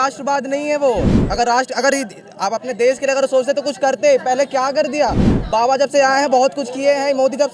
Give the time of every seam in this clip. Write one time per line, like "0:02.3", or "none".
none